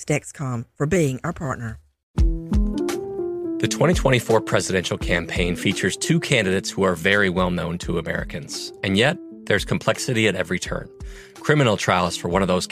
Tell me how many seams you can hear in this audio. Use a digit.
1